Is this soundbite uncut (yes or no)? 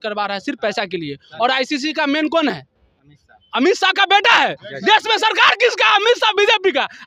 yes